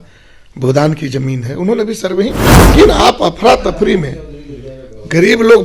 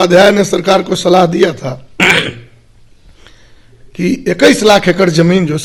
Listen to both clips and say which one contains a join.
first; 1 cut; at 2.6 s

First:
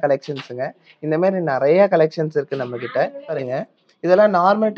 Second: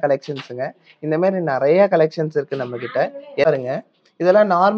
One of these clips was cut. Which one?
first; 1 cut; at 3.4 s

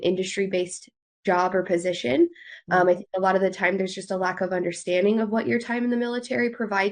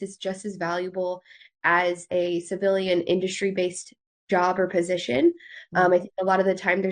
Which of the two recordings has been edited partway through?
second; 1 cut; at 2.1 s

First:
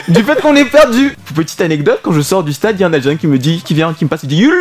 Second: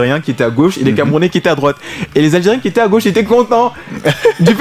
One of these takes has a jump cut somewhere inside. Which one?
first; 1 cut; at 1.2 s

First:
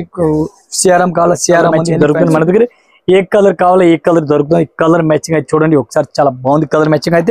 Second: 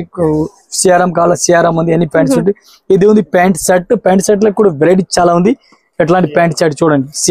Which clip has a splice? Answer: first; 1 cut; at 1.9 s

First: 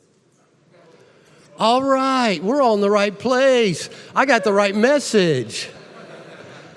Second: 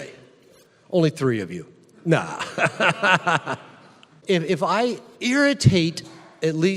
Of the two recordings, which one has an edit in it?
second; 1 cut; at 4.1 s

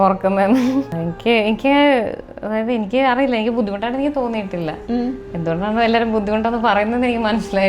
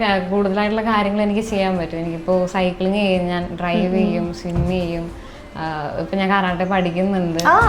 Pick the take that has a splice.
first; 1 cut; at 0.9 s

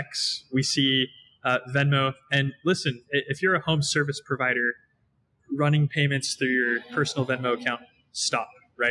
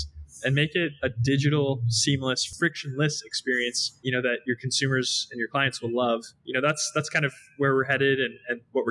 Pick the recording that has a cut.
second; 3 cuts; at 2.4 s, 3.9 s, 6.4 s

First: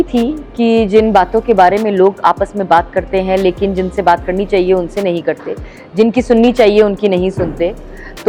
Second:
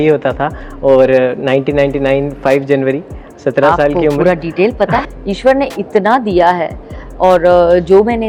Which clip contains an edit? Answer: second; 1 cut; at 5.0 s

